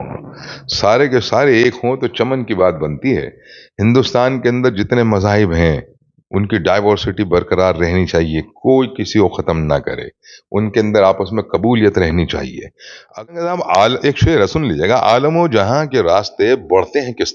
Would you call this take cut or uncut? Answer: cut